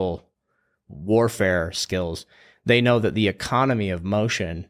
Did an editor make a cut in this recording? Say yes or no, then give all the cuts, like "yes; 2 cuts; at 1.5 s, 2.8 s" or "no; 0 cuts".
no; 0 cuts